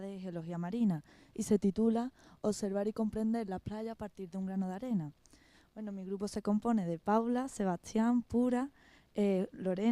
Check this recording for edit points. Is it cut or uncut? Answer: cut